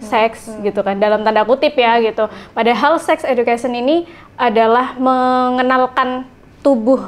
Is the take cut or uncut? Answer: uncut